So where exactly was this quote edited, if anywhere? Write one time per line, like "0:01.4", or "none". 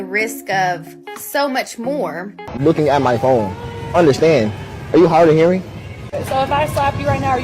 0:02.6